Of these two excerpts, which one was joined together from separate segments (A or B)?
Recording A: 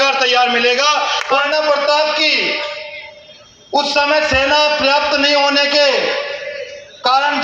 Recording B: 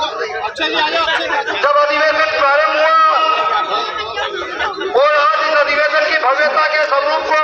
A